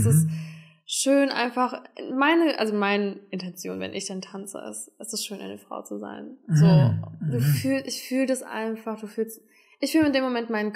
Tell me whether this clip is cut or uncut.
uncut